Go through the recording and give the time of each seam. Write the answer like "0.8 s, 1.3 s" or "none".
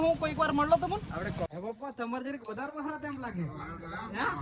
1.5 s

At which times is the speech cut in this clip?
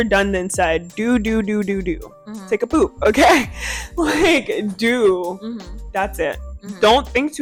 none

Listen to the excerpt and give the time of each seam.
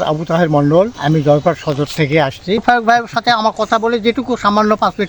1.0 s, 2.6 s

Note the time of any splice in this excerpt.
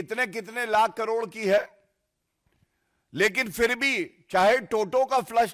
none

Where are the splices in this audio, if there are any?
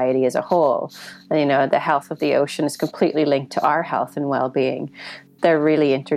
3.5 s

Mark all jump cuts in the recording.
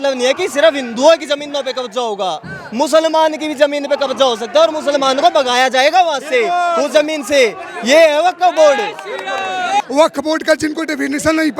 9.8 s

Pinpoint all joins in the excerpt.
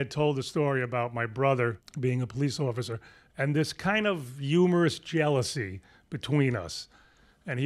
1.9 s

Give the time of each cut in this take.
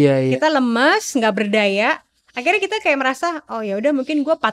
none

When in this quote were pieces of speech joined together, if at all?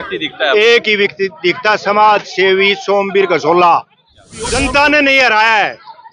4.5 s

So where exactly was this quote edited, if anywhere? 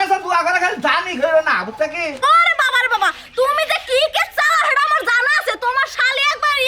2.2 s

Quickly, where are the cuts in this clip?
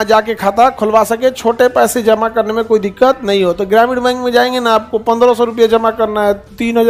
none

